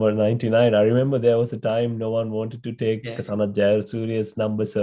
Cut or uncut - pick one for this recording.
uncut